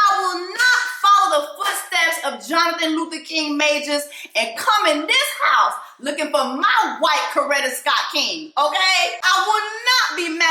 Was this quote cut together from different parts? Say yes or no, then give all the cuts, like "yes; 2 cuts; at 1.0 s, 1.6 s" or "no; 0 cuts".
yes; 1 cut; at 9.2 s